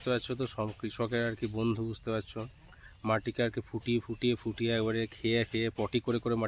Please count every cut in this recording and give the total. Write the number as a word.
zero